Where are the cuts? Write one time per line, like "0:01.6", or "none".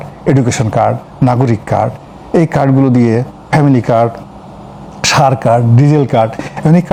none